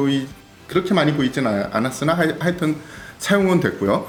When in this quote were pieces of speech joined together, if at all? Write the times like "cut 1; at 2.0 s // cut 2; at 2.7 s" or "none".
none